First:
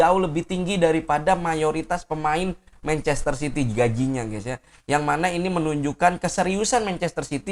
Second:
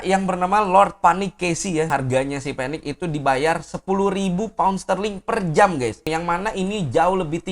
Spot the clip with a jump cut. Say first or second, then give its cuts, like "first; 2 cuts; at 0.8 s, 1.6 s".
second; 2 cuts; at 1.9 s, 6.1 s